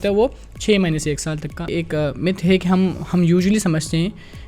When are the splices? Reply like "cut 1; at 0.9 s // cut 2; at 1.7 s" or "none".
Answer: cut 1; at 1.7 s